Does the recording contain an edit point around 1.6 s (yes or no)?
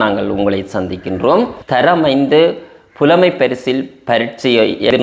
yes